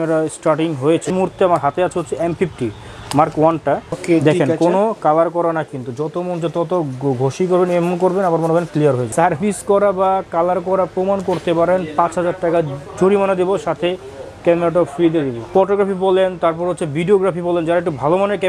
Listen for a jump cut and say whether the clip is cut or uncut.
cut